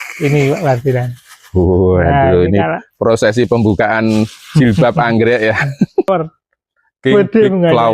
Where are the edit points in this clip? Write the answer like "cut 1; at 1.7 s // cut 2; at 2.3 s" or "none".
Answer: cut 1; at 6.1 s